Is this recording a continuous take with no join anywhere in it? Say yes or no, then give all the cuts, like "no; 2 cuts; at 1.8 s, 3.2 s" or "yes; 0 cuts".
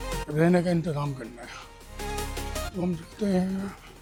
yes; 0 cuts